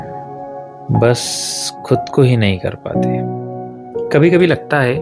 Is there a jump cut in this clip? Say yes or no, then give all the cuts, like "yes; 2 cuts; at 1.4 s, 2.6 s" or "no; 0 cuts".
yes; 2 cuts; at 2.7 s, 4.1 s